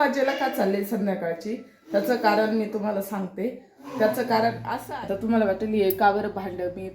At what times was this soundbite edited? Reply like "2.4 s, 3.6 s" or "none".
4.7 s